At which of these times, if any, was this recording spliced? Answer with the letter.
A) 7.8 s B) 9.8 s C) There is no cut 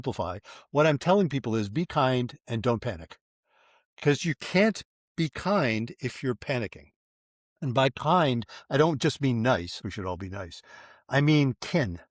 B